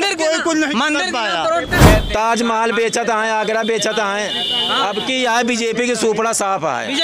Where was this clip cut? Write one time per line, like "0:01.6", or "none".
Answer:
0:01.8

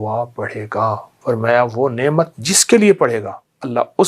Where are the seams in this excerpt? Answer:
0:01.1

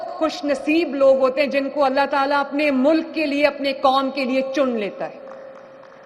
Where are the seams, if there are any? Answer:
none

